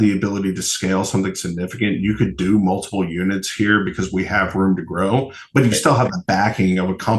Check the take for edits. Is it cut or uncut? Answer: uncut